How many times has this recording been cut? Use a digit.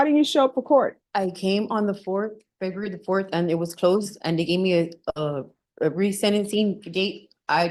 0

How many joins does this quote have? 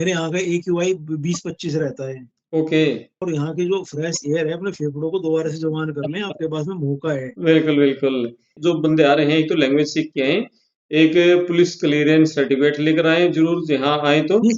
2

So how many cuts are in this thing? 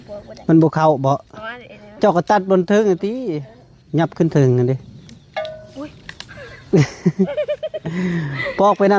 0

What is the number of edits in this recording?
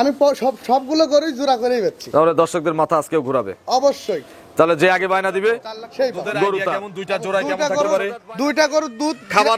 1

